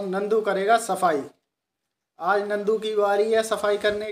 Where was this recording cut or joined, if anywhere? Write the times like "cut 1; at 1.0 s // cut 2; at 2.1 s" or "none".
none